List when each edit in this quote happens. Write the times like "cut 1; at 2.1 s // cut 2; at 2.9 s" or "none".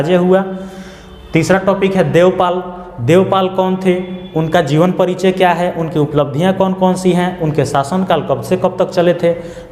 none

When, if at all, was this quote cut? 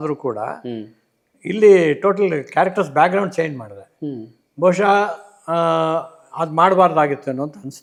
none

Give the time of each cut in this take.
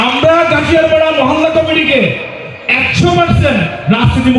none

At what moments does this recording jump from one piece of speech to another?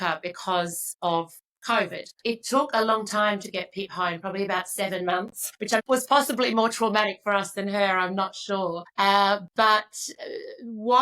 cut 1; at 2.2 s // cut 2; at 5.6 s // cut 3; at 8.8 s

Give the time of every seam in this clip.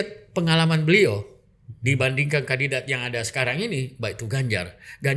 none

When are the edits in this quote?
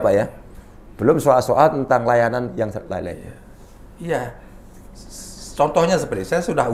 none

